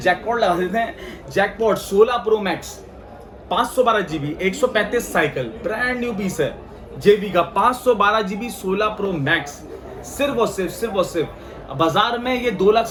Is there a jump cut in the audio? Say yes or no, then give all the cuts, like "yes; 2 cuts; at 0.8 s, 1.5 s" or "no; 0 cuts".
no; 0 cuts